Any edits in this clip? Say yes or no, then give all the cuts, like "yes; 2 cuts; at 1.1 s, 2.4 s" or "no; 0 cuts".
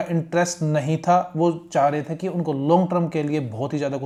no; 0 cuts